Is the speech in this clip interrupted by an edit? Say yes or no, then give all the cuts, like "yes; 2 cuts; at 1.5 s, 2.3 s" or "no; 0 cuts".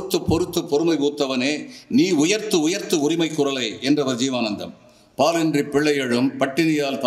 no; 0 cuts